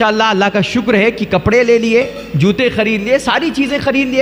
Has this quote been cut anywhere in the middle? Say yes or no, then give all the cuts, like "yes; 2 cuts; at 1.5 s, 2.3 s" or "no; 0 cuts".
no; 0 cuts